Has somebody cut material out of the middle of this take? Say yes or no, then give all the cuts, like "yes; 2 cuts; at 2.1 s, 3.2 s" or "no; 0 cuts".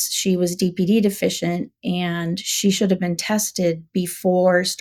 no; 0 cuts